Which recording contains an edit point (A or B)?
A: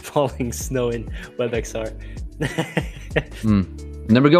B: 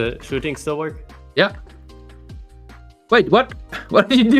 A